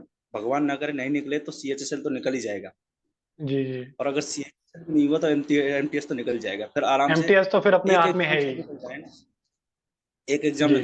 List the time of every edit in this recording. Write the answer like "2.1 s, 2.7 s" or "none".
none